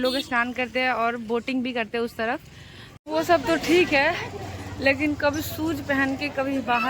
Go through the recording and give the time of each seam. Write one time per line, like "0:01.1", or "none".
0:02.9